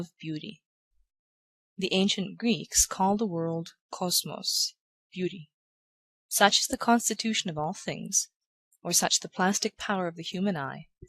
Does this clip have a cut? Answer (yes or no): yes